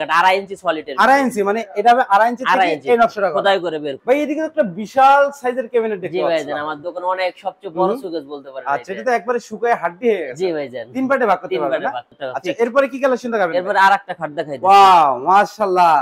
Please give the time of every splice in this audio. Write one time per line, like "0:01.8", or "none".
0:03.9
0:12.1